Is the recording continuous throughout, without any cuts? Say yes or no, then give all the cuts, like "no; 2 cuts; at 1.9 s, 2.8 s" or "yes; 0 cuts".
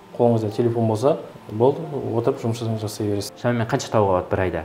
no; 2 cuts; at 1.4 s, 3.3 s